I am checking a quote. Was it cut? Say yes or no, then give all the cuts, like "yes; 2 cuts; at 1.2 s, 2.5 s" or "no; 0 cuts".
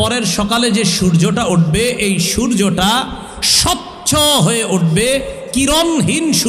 no; 0 cuts